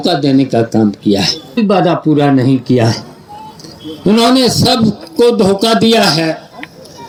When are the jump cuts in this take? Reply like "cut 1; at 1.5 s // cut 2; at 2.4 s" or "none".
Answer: none